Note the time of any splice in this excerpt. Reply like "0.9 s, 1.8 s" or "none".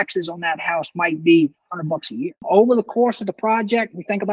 2.4 s